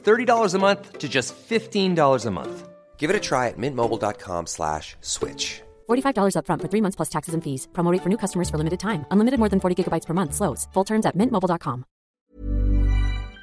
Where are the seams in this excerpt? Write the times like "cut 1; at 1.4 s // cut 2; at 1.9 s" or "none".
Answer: cut 1; at 12.1 s